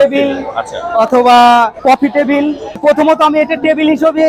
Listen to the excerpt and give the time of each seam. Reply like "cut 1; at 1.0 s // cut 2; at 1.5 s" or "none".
cut 1; at 1.8 s // cut 2; at 2.8 s